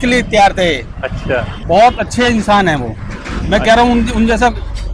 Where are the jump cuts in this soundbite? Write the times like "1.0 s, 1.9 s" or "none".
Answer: 1.5 s